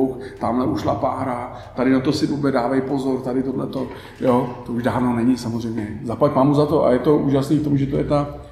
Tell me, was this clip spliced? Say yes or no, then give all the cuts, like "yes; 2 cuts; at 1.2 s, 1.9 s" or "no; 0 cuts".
no; 0 cuts